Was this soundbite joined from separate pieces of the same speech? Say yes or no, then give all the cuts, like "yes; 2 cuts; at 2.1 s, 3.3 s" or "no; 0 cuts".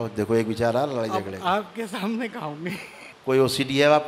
yes; 1 cut; at 3.1 s